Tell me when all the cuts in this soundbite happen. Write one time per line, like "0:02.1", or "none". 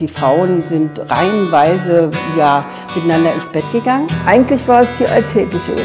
0:04.1